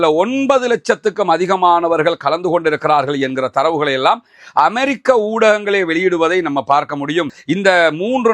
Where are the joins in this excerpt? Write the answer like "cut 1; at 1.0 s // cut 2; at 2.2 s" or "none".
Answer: cut 1; at 7.4 s